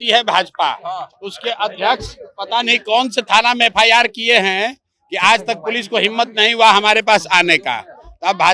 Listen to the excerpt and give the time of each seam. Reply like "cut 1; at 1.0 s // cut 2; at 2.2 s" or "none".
none